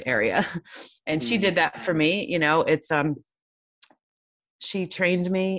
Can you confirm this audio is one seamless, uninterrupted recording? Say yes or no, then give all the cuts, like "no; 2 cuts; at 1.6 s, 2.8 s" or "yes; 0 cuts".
yes; 0 cuts